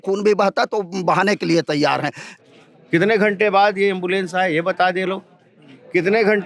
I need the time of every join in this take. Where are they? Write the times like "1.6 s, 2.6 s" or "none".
2.2 s